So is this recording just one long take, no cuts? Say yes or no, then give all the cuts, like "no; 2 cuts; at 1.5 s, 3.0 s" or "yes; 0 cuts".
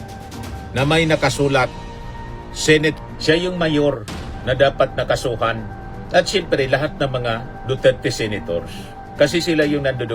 no; 1 cut; at 3.0 s